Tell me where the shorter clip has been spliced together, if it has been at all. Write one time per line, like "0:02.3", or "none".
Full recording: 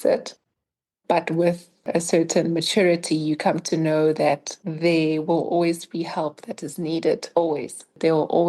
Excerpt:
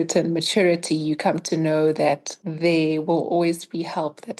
none